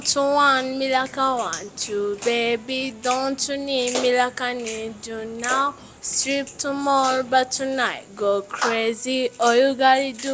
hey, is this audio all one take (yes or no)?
yes